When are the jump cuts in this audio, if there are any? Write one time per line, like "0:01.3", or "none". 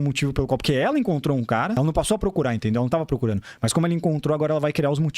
0:01.8